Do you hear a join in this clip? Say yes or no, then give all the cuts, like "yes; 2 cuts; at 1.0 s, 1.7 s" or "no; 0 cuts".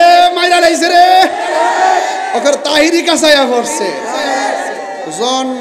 no; 0 cuts